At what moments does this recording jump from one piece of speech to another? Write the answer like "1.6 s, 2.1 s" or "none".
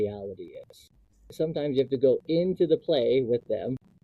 1.3 s